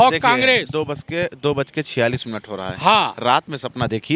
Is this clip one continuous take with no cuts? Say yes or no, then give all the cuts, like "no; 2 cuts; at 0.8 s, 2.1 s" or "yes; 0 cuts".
yes; 0 cuts